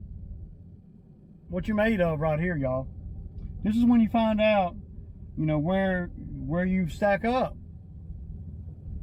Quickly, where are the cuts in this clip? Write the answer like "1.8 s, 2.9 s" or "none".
none